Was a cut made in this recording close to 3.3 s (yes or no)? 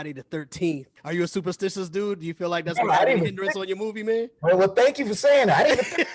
no